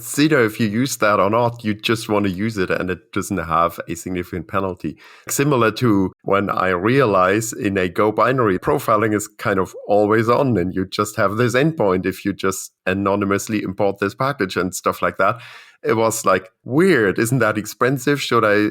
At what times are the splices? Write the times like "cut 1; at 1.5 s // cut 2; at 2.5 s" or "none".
cut 1; at 5.3 s // cut 2; at 6.2 s // cut 3; at 8.6 s // cut 4; at 12.7 s // cut 5; at 16.6 s